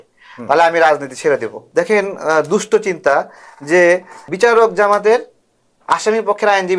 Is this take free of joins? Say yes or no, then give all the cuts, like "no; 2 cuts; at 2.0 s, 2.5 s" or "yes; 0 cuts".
no; 2 cuts; at 1.6 s, 4.3 s